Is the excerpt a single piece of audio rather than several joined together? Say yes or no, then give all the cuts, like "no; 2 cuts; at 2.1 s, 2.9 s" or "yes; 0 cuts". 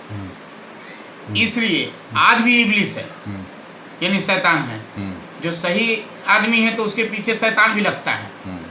yes; 0 cuts